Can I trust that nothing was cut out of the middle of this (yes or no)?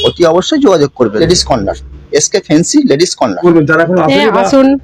no